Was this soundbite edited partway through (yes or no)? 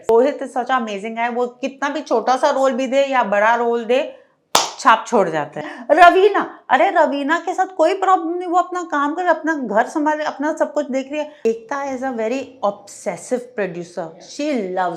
yes